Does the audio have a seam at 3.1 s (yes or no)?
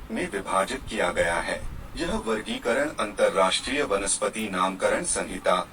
no